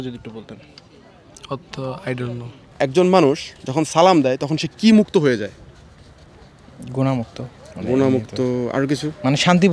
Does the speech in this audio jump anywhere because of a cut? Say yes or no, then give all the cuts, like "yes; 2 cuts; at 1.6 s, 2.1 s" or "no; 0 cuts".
yes; 1 cut; at 2.6 s